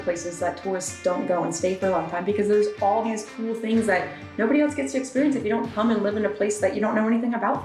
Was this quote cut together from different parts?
no; 0 cuts

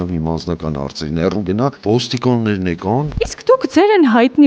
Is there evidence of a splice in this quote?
yes; 2 cuts; at 1.8 s, 3.1 s

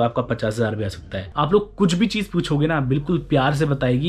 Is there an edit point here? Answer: yes; 1 cut; at 1.2 s

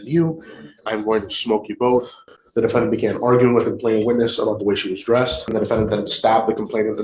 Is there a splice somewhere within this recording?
yes; 2 cuts; at 2.4 s, 5.5 s

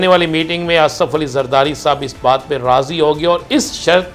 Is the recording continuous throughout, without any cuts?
yes; 0 cuts

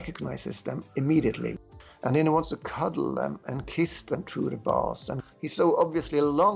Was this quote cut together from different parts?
yes; 2 cuts; at 1.6 s, 5.1 s

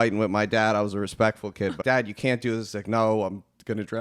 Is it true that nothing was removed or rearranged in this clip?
no; 1 cut; at 1.8 s

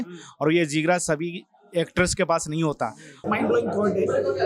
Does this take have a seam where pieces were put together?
yes; 1 cut; at 3.1 s

